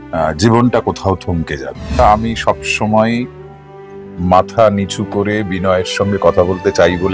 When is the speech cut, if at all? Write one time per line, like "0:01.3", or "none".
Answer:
0:02.0